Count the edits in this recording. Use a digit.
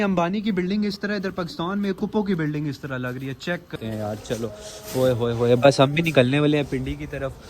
1